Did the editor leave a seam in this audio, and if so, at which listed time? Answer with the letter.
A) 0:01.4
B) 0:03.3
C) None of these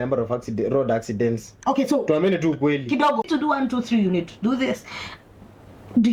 B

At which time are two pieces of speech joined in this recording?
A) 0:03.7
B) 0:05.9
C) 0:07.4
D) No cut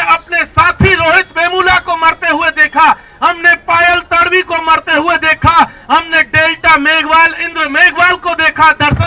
D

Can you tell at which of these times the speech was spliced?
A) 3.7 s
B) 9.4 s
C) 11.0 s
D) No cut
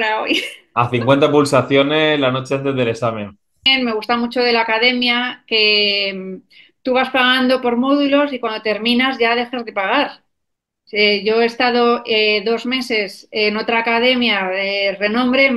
A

